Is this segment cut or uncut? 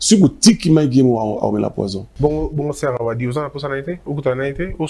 cut